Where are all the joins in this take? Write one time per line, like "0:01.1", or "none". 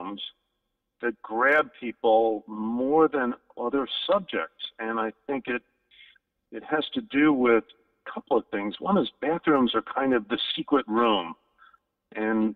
none